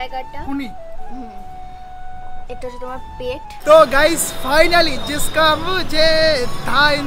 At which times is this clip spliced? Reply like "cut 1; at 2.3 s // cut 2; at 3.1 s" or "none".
cut 1; at 3.6 s